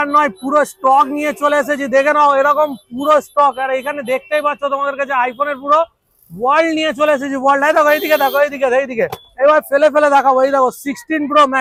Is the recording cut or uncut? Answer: uncut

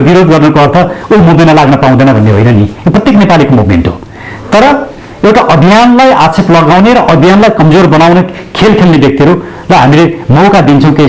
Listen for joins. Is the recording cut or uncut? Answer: uncut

